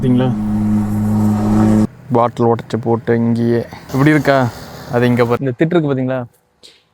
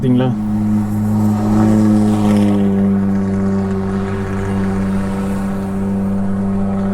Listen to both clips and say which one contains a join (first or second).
first